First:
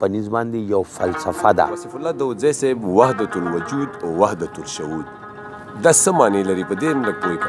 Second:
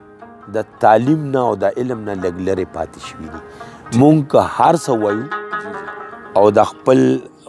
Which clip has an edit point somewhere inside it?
first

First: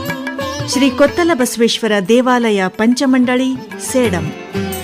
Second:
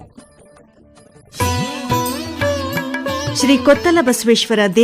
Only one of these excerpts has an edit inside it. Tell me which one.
second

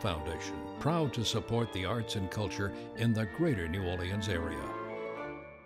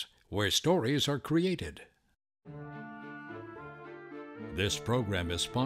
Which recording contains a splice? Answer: second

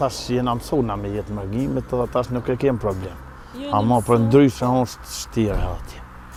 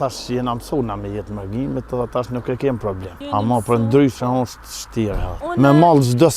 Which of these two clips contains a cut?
second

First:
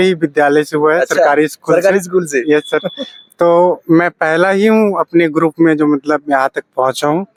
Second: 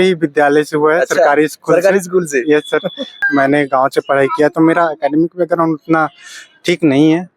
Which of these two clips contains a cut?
second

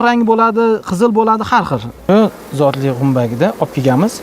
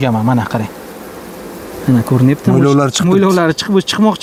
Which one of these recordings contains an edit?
first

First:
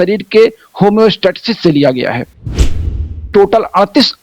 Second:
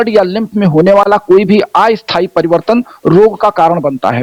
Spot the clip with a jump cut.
first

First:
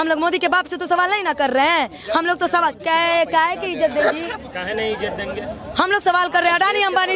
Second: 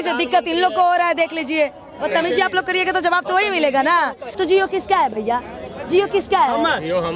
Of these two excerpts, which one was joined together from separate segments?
second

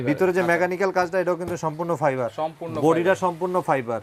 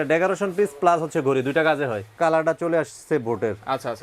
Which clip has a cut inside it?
second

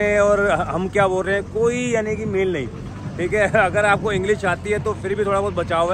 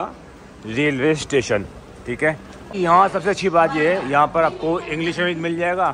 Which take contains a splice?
second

